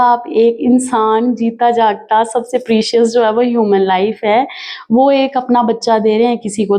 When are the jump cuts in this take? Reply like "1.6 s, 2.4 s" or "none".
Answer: none